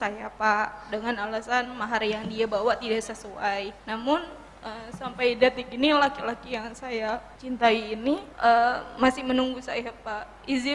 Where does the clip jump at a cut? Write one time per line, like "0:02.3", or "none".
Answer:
0:03.8
0:07.3
0:08.3